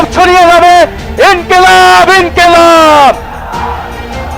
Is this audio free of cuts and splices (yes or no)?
yes